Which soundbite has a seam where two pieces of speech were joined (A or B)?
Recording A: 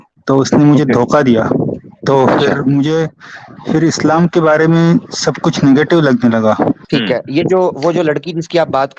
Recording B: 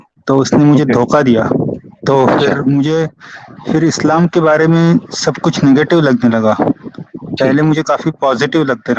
A